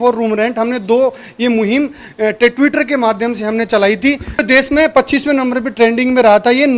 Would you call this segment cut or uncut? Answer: cut